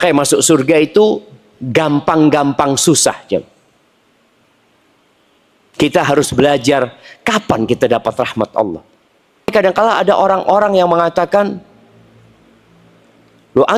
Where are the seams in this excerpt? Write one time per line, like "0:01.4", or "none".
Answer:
0:09.5